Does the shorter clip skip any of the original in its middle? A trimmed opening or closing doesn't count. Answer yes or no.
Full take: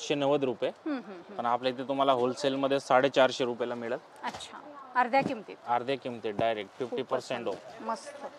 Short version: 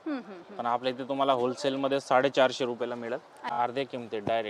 yes